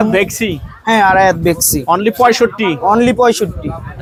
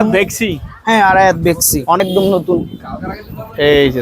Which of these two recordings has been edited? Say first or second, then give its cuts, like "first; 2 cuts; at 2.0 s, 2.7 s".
second; 1 cut; at 2.0 s